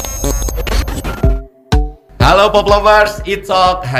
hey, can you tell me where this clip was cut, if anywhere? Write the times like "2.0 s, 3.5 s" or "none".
1.2 s